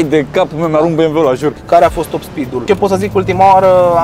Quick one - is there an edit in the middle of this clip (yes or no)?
yes